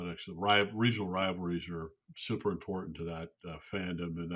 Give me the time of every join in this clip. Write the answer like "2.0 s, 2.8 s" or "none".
2.1 s